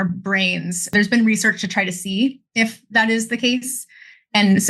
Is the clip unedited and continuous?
no; 1 cut; at 0.9 s

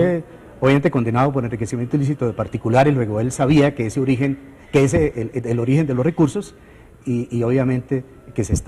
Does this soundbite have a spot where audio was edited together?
yes; 1 cut; at 2.6 s

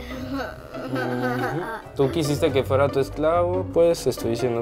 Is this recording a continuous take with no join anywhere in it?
yes; 0 cuts

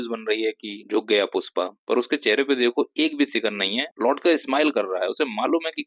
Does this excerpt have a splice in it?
no; 0 cuts

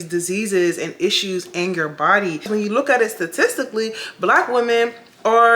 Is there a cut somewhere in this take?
yes; 1 cut; at 2.5 s

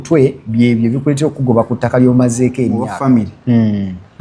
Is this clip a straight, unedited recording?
no; 1 cut; at 2.9 s

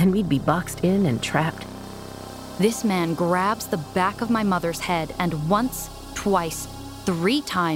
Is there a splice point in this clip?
yes; 1 cut; at 2.2 s

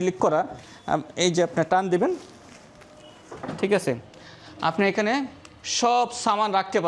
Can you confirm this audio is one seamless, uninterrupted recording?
yes; 0 cuts

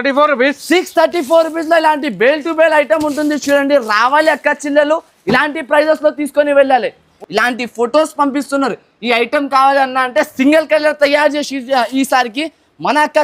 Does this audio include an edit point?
yes; 1 cut; at 7.1 s

